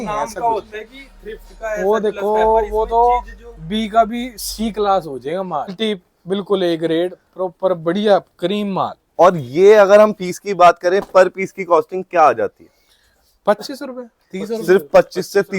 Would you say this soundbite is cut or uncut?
cut